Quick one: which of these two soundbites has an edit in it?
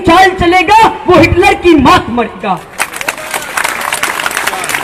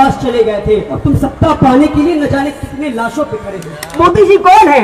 second; 2 cuts; at 0.9 s, 4.0 s

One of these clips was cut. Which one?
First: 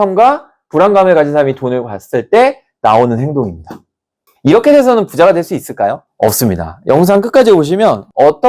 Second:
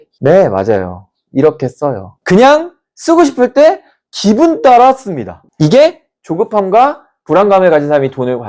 second; 1 cut; at 2.1 s

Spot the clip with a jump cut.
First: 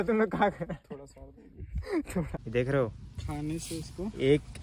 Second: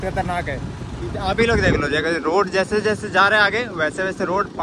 first; 1 cut; at 2.4 s

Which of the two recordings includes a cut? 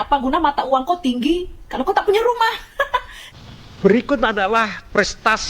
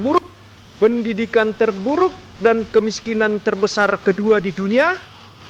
first; 1 cut; at 3.2 s

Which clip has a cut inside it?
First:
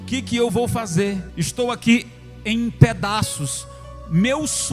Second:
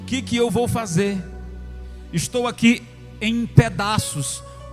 first; 1 cut; at 1.3 s

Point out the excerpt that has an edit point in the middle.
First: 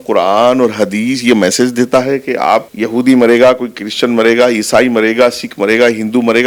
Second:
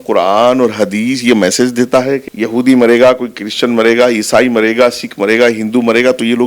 second; 1 cut; at 2.3 s

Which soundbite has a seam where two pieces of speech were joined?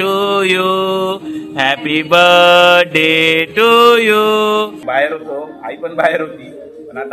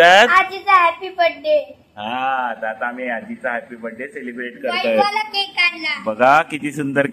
first; 1 cut; at 4.8 s

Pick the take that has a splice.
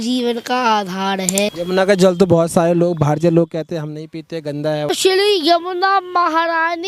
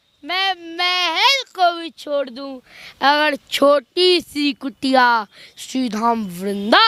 first; 2 cuts; at 1.5 s, 4.9 s

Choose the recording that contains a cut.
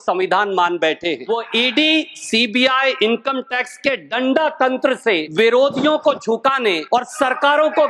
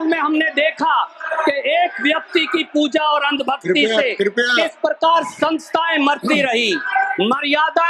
first; 3 cuts; at 1.2 s, 5.3 s, 6.8 s

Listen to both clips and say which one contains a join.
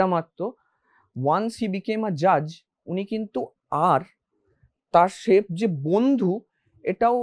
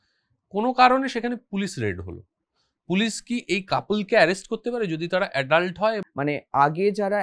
second; 1 cut; at 6.0 s

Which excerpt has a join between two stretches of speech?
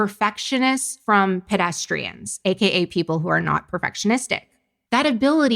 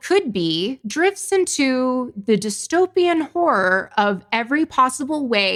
first; 1 cut; at 0.9 s

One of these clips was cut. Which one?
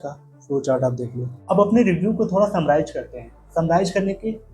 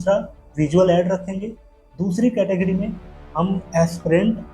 first; 1 cut; at 1.3 s

